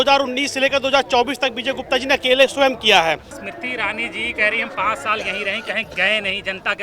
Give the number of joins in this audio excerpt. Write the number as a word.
one